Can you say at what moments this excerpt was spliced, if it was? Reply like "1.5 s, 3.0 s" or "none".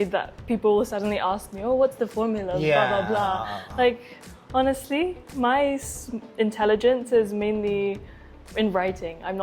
none